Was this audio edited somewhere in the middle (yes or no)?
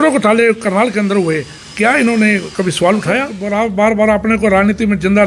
yes